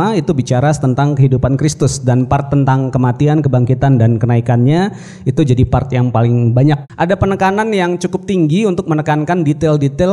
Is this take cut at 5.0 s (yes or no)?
no